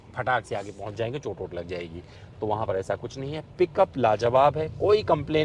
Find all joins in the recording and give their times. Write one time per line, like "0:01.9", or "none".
none